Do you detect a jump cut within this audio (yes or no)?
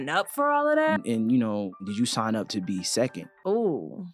yes